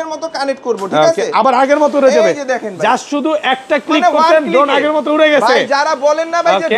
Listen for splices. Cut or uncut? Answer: uncut